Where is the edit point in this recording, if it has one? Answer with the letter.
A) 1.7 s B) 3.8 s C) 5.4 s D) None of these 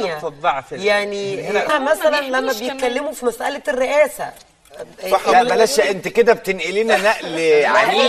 A